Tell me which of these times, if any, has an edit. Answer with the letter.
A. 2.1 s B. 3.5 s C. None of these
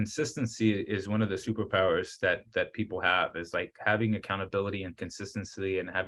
C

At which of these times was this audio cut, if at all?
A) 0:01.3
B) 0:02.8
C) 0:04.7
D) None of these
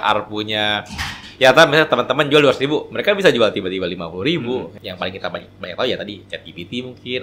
C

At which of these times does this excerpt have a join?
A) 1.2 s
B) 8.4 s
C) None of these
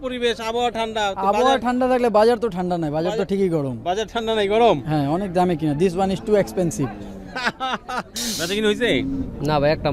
B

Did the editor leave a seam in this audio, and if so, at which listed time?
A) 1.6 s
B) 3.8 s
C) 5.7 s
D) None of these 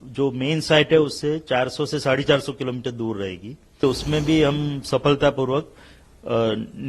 B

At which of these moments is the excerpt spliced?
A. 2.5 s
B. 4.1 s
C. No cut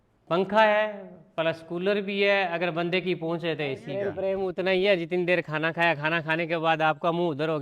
B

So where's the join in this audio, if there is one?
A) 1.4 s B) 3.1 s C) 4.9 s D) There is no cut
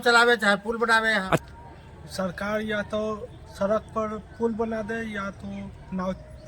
A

